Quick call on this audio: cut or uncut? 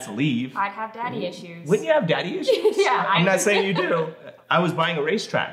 cut